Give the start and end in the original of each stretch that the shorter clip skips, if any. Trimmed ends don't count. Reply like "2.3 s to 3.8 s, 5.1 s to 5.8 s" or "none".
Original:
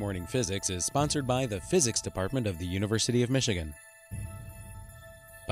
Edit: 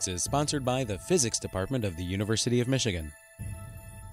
3.9 s to 4.0 s